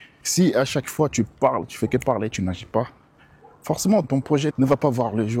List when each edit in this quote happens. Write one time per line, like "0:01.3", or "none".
0:04.0